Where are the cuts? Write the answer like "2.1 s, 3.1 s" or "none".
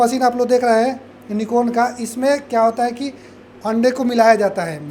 none